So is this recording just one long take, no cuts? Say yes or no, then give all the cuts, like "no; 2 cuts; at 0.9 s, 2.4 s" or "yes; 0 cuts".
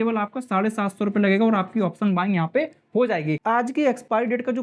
no; 1 cut; at 3.4 s